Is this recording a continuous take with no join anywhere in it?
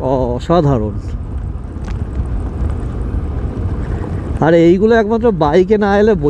yes; 0 cuts

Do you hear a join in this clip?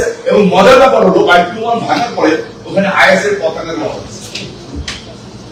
no; 0 cuts

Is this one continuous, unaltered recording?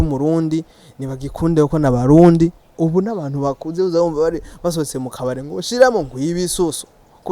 no; 1 cut; at 2.6 s

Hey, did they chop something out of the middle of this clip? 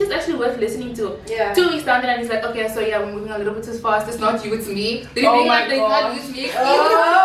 no; 0 cuts

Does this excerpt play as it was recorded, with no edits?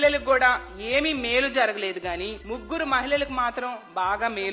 yes; 0 cuts

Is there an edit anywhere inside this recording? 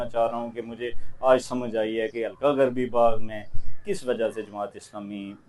no; 0 cuts

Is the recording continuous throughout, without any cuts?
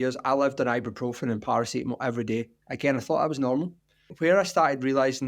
no; 1 cut; at 4.1 s

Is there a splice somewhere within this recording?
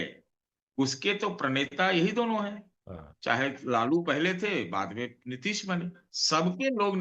yes; 1 cut; at 6.1 s

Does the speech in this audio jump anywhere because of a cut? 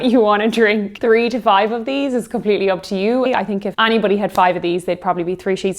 yes; 2 cuts; at 0.9 s, 3.3 s

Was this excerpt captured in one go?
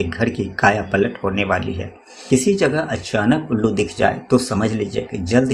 no; 1 cut; at 2.2 s

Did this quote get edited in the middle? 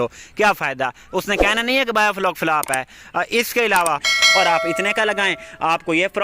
yes; 1 cut; at 4.1 s

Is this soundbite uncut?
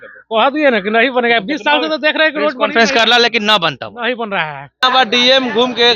no; 1 cut; at 4.8 s

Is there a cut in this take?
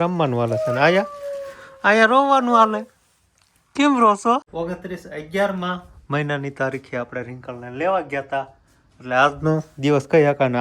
yes; 1 cut; at 4.5 s

